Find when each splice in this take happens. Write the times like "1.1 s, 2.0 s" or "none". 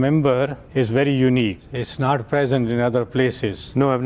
1.6 s

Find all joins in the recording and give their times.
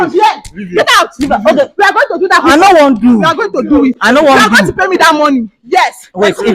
none

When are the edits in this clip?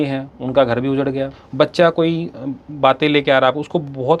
1.4 s

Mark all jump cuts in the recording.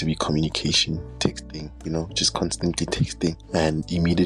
1.3 s, 3.4 s

